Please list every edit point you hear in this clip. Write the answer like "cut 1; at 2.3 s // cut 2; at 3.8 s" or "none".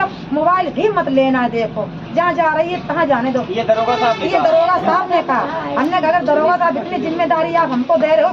none